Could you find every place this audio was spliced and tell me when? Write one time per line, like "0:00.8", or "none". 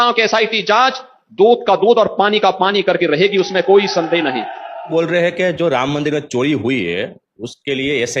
0:04.9